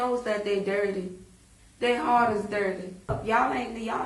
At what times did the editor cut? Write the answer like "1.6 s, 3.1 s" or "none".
3.2 s